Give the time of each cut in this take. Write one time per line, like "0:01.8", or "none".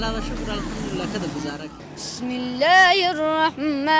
0:01.7

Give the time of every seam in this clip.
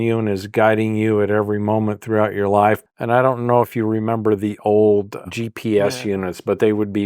0:02.8
0:05.2

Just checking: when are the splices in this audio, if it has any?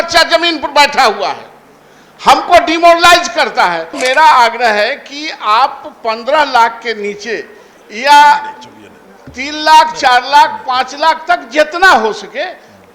0:04.0

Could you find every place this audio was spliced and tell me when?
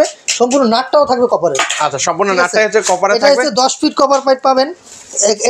none

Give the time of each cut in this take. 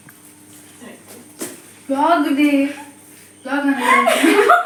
none

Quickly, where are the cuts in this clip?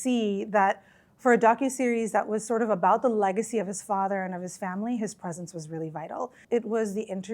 0:06.4

